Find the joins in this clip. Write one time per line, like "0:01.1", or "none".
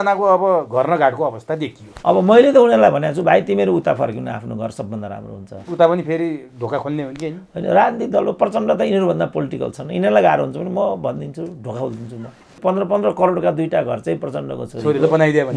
0:12.6